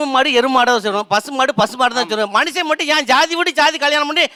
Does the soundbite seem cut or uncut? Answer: uncut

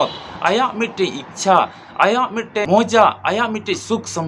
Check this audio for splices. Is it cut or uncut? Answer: cut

